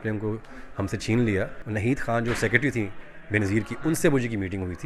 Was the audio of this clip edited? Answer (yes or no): yes